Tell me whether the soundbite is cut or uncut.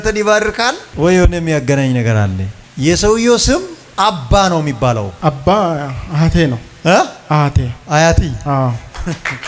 uncut